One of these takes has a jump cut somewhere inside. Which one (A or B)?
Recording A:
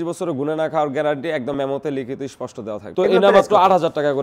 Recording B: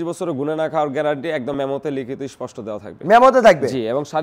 A